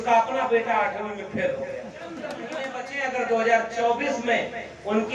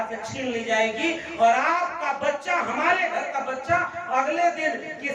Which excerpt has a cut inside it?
first; 1 cut; at 2.4 s

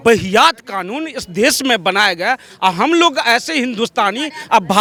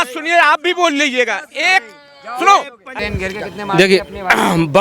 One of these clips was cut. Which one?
second; 1 cut; at 3.0 s

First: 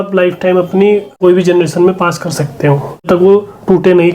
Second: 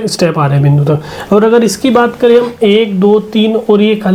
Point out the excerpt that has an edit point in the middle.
first; 2 cuts; at 1.1 s, 3.0 s

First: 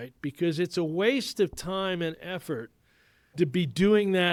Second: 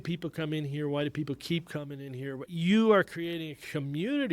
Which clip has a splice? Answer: second; 1 cut; at 2.5 s

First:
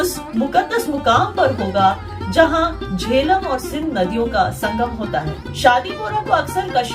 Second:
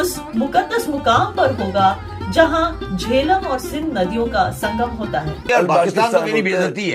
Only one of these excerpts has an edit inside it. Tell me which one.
second; 1 cut; at 5.5 s

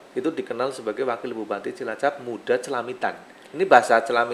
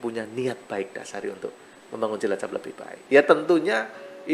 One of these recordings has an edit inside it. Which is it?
second; 1 cut; at 3.0 s

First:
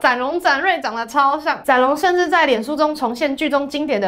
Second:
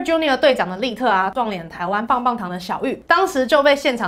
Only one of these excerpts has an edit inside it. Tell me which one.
second; 2 cuts; at 1.3 s, 3.0 s

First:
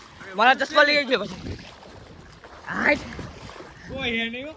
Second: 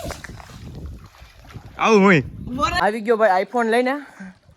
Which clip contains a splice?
second; 1 cut; at 2.8 s

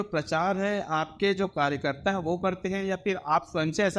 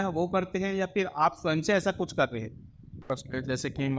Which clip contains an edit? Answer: second; 1 cut; at 3.1 s

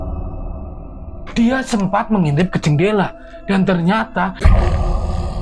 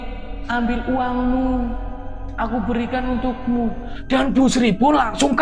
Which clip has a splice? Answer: first; 1 cut; at 4.4 s

